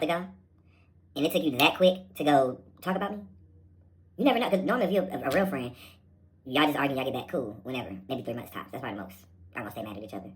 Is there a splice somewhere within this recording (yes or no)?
no